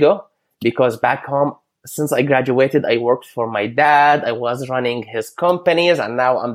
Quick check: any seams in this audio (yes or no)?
no